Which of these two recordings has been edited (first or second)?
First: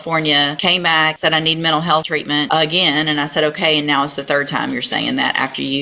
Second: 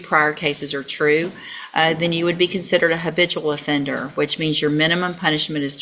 first